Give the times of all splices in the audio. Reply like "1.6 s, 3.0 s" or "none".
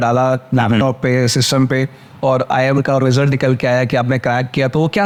none